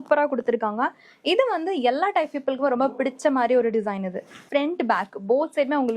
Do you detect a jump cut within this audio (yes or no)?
yes